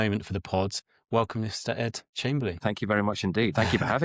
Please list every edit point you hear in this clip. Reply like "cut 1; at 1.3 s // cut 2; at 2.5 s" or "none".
cut 1; at 0.8 s // cut 2; at 2.6 s

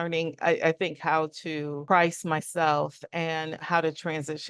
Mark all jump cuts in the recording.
cut 1; at 1.8 s // cut 2; at 3.6 s

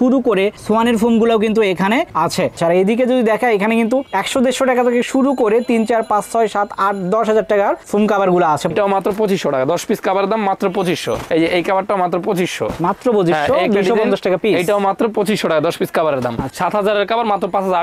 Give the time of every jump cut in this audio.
cut 1; at 2.5 s // cut 2; at 8.7 s // cut 3; at 16.5 s

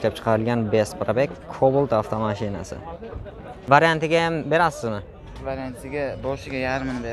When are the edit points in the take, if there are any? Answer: cut 1; at 3.5 s

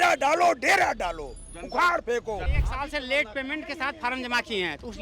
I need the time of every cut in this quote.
cut 1; at 2.5 s

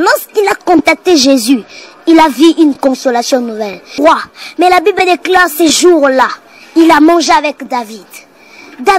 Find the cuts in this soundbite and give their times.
cut 1; at 4.0 s

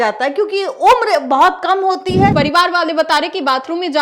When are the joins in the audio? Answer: cut 1; at 2.3 s

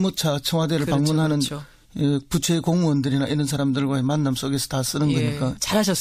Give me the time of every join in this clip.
cut 1; at 2.3 s

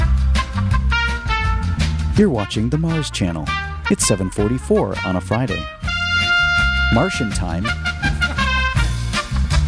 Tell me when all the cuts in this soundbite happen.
none

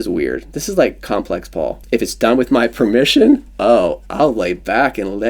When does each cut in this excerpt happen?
cut 1; at 2.2 s

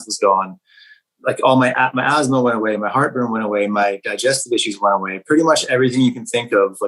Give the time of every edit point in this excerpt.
cut 1; at 1.0 s

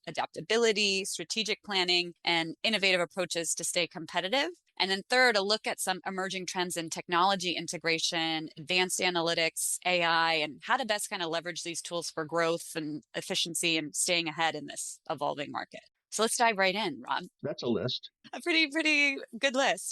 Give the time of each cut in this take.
cut 1; at 17.3 s // cut 2; at 18.1 s

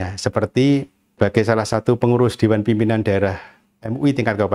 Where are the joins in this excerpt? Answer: cut 1; at 1.0 s

